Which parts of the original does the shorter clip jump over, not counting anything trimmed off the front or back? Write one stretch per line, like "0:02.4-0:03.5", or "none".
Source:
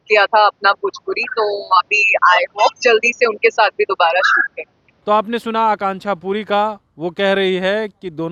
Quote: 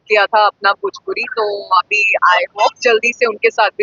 none